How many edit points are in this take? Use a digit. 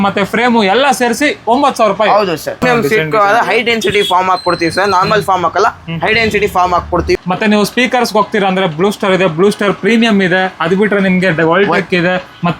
2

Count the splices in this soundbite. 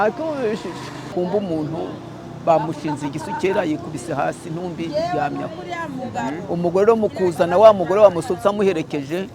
1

